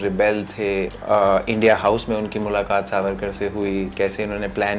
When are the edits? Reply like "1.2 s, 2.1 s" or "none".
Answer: 1.0 s